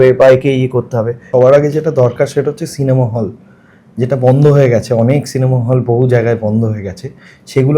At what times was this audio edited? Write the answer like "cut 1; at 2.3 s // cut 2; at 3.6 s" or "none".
cut 1; at 1.3 s